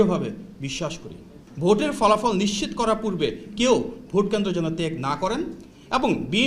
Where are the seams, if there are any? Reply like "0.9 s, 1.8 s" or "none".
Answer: 1.4 s